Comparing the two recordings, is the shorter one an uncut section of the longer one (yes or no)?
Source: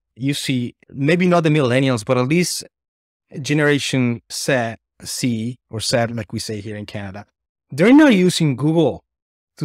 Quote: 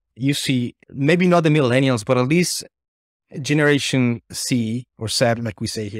no